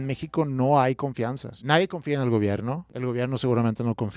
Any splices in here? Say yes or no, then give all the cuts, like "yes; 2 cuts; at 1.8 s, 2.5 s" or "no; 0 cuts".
yes; 2 cuts; at 1.5 s, 2.9 s